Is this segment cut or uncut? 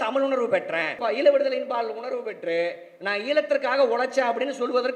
cut